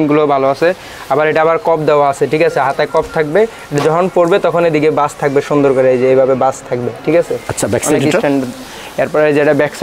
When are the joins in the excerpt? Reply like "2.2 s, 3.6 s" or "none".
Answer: none